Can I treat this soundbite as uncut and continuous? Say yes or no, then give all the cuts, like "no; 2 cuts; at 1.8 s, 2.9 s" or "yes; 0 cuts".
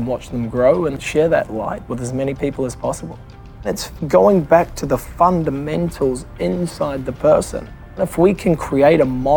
no; 3 cuts; at 1.0 s, 3.9 s, 8.1 s